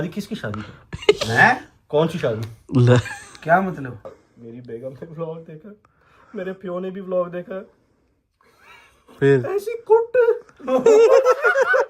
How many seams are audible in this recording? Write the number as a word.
one